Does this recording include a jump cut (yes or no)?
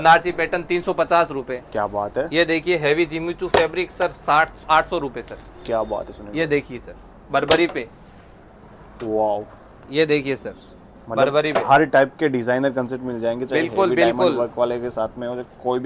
no